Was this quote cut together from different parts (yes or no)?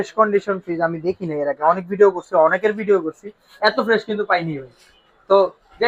no